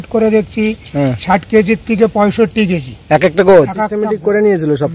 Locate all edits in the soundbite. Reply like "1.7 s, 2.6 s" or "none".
3.9 s